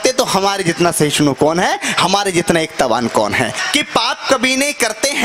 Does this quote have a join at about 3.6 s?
yes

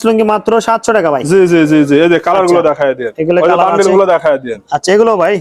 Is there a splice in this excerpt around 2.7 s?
no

